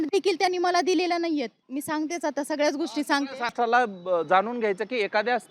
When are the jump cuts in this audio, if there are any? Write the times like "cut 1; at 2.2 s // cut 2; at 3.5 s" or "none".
cut 1; at 1.6 s // cut 2; at 3.5 s